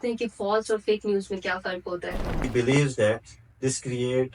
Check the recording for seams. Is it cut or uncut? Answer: cut